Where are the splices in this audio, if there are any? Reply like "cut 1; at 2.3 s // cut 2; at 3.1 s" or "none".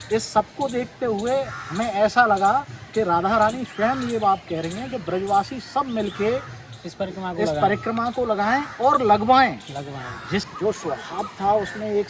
cut 1; at 10.5 s